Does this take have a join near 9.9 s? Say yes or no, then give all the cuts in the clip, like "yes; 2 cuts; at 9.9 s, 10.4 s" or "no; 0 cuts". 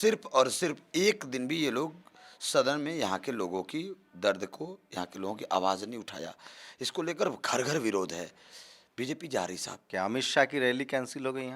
yes; 1 cut; at 9.9 s